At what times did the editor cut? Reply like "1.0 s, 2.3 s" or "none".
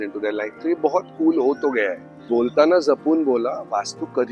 2.1 s